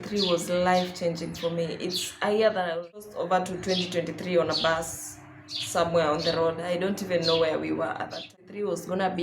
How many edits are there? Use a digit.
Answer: 2